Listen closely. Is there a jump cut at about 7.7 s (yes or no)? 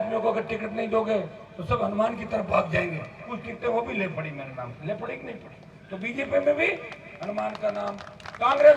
no